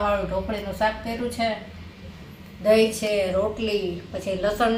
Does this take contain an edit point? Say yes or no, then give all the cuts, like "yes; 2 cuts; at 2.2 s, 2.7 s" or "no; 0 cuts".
no; 0 cuts